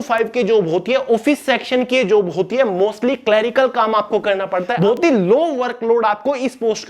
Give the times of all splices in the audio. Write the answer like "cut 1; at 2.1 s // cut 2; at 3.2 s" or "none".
cut 1; at 4.7 s